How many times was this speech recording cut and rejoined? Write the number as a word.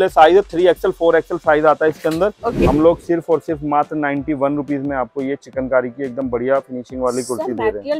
one